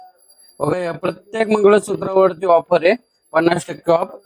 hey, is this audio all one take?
yes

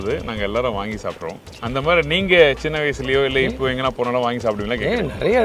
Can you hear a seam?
yes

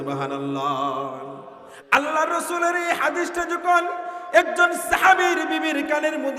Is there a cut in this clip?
yes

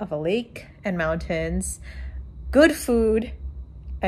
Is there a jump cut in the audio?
no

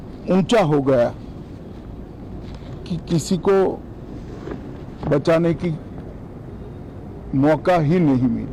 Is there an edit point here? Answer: no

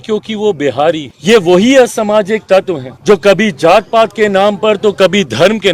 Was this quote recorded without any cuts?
no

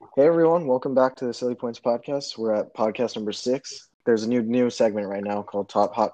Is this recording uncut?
no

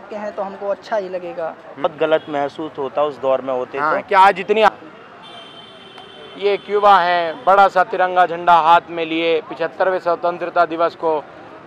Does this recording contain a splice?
yes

